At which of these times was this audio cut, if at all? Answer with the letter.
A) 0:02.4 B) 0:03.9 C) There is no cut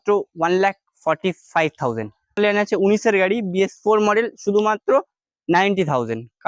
A